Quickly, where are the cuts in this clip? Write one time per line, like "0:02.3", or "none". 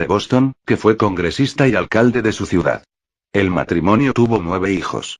0:01.5